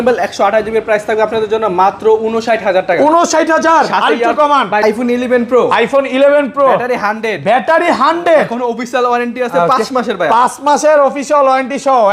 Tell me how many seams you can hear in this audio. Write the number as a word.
one